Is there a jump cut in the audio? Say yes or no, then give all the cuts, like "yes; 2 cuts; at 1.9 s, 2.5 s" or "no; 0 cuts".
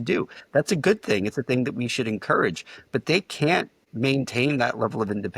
yes; 1 cut; at 3.8 s